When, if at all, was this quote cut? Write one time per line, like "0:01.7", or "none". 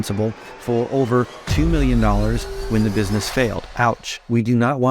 0:03.9